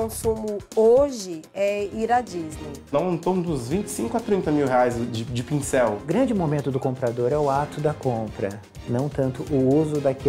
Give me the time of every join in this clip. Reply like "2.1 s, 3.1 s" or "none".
2.9 s, 6.0 s